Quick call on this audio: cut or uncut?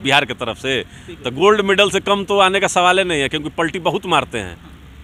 uncut